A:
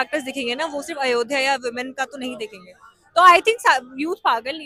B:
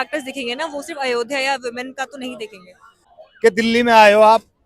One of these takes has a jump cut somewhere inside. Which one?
B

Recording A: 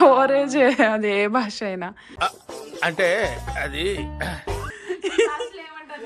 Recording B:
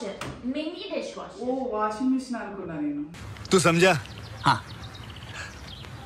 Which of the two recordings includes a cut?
A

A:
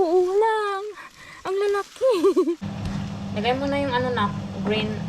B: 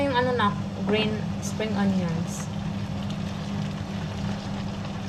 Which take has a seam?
A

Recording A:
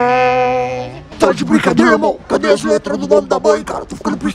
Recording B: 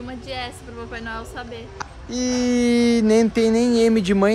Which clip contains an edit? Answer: B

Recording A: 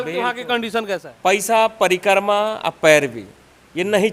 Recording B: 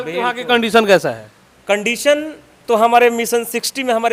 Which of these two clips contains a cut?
A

